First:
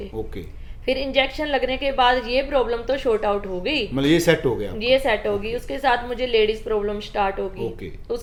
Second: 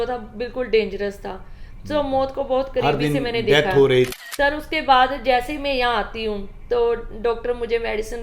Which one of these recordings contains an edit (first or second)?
second